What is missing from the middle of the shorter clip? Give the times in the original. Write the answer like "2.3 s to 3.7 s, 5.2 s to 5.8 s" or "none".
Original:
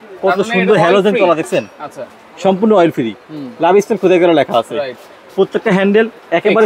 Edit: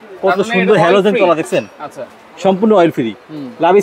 none